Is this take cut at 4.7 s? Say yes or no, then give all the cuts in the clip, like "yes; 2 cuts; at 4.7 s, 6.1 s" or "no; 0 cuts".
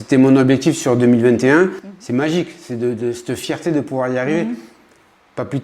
no; 1 cut; at 1.8 s